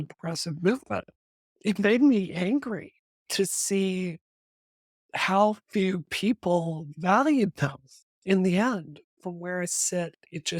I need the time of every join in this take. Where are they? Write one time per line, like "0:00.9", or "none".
0:01.1
0:09.1